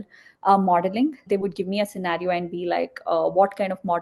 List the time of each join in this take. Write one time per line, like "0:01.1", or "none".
0:01.2